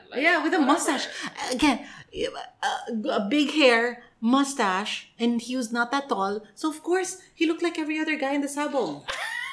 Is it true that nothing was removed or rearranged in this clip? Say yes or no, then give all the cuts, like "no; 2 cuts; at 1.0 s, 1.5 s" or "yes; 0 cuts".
yes; 0 cuts